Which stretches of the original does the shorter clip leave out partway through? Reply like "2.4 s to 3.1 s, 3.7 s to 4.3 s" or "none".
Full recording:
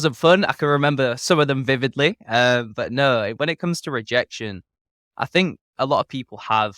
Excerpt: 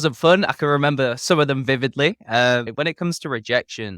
2.7 s to 3.3 s